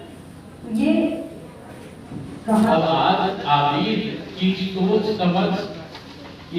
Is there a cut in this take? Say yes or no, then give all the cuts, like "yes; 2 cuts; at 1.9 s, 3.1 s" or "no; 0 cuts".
yes; 1 cut; at 2.7 s